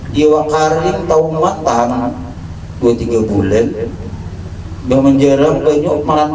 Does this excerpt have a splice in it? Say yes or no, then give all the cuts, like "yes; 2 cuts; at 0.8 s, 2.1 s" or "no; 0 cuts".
no; 0 cuts